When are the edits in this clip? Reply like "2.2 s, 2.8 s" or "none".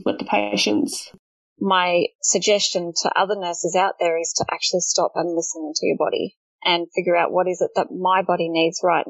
1.1 s, 2.2 s